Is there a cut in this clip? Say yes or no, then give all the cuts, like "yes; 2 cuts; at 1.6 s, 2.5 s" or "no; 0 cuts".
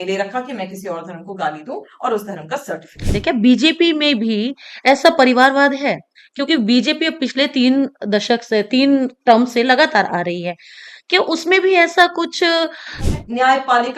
yes; 2 cuts; at 3.1 s, 13.0 s